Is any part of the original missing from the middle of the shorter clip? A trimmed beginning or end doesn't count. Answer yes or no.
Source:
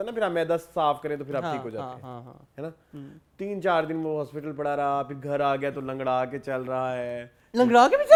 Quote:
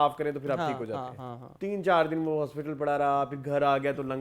yes